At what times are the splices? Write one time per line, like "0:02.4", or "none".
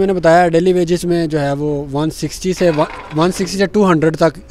none